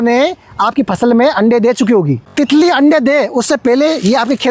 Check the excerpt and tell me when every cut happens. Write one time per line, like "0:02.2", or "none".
0:02.2